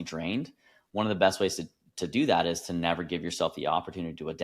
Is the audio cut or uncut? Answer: uncut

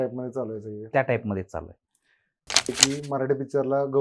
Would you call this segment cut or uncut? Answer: cut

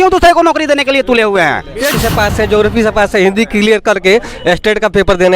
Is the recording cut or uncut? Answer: cut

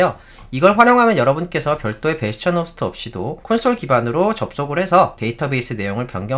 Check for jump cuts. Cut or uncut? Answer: cut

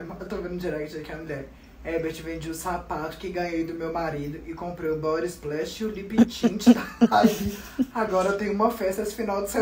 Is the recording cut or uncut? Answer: uncut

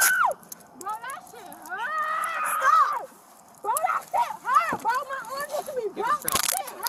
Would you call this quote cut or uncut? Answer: uncut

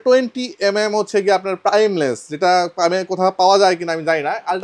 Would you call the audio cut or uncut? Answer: uncut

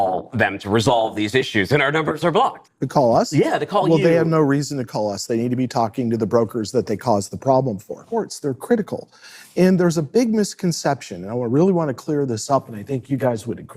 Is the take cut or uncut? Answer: cut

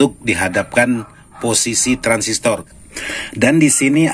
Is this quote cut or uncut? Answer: cut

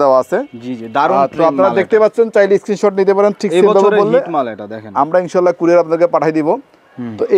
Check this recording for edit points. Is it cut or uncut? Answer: uncut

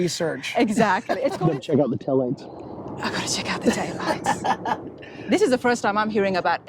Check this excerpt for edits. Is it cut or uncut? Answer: cut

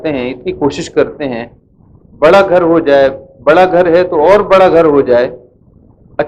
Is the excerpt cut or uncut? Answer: uncut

